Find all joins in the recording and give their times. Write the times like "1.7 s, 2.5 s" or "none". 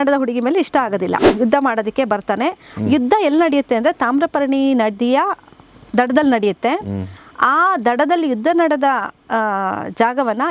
1.2 s